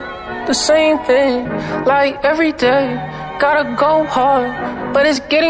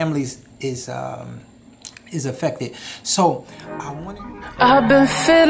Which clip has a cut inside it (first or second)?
second